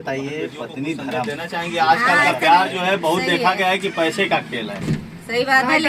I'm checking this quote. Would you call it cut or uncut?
cut